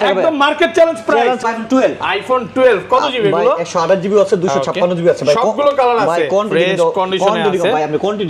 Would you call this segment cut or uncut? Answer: cut